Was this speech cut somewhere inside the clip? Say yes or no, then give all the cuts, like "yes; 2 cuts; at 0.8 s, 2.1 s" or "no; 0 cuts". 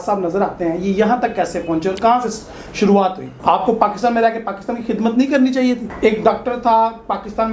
yes; 2 cuts; at 3.3 s, 5.9 s